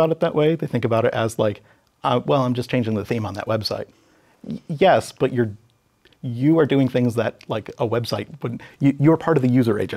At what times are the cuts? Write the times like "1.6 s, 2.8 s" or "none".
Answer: none